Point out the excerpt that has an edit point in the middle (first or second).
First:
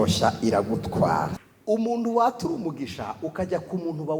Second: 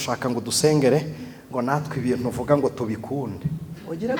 first